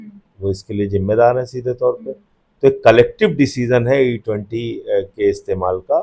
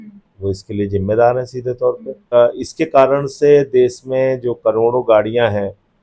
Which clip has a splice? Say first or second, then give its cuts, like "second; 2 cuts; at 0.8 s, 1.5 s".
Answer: second; 1 cut; at 2.3 s